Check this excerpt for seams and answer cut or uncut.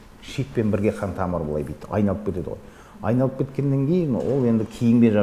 uncut